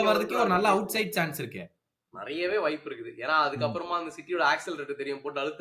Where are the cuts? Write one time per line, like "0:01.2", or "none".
0:02.1